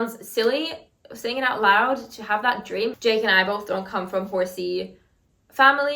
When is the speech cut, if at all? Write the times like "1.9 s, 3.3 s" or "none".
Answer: none